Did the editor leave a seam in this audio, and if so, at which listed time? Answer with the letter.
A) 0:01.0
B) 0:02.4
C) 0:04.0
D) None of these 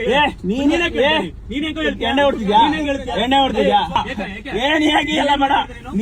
C